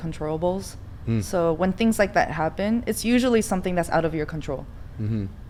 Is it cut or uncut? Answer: uncut